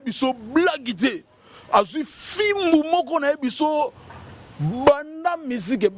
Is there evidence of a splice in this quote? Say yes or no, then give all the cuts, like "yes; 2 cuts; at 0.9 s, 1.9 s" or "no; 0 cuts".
no; 0 cuts